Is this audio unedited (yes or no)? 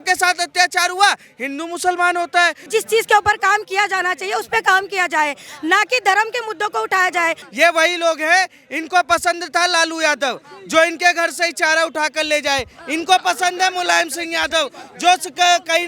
no